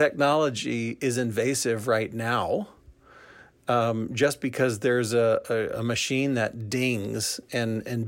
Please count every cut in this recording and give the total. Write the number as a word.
zero